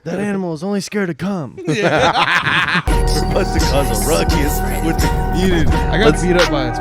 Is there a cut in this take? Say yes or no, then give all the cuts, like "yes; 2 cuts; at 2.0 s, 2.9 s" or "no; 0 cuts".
yes; 1 cut; at 2.8 s